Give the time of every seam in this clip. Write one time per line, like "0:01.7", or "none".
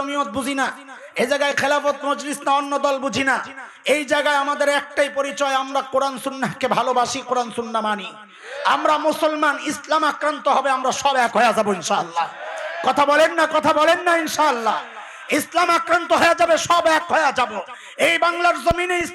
none